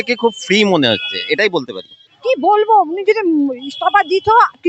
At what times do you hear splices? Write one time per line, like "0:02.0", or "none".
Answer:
0:01.9